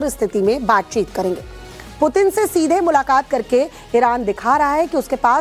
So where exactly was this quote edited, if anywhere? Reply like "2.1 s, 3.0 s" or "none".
3.8 s